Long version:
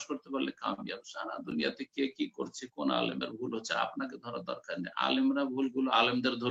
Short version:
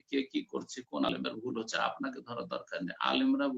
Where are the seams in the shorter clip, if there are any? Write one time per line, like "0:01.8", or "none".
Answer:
0:01.1